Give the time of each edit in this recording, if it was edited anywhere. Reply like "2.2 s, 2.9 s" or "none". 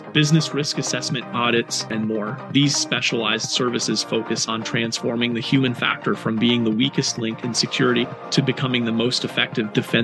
none